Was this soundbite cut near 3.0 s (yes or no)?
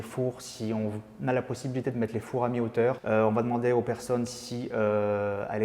yes